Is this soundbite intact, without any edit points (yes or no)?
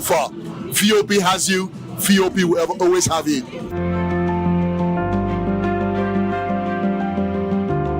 no